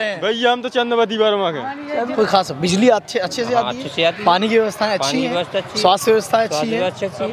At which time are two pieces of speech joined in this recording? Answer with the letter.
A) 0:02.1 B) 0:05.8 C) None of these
A